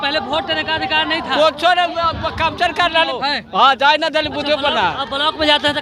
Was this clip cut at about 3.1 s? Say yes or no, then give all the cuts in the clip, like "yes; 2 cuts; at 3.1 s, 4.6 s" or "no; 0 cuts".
no; 0 cuts